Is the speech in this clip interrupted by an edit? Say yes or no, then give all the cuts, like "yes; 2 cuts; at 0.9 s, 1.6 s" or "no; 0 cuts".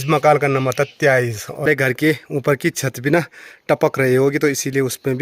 yes; 1 cut; at 1.7 s